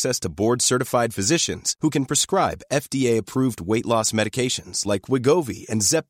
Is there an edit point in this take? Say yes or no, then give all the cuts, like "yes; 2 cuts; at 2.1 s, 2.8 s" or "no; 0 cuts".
no; 0 cuts